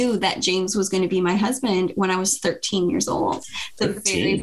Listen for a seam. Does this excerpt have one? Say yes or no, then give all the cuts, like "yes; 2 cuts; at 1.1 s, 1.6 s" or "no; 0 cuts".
no; 0 cuts